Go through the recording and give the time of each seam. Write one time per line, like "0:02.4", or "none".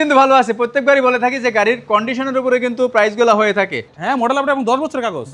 0:03.9